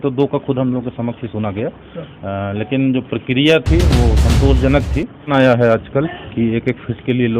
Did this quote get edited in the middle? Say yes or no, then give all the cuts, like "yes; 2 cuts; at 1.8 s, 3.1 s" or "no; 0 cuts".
yes; 1 cut; at 5.3 s